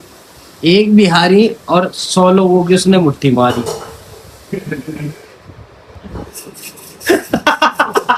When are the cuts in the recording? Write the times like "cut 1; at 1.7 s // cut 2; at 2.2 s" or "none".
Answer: none